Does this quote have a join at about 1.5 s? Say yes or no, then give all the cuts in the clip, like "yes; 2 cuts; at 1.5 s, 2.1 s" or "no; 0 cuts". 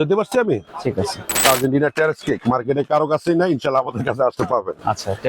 yes; 1 cut; at 1.5 s